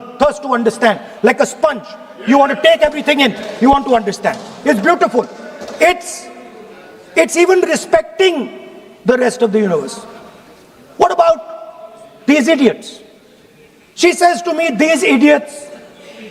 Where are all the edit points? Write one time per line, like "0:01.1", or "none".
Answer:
none